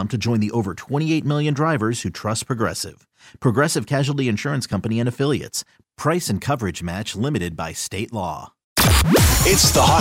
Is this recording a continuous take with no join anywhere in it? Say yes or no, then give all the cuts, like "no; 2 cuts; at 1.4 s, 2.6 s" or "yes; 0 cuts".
no; 1 cut; at 8.7 s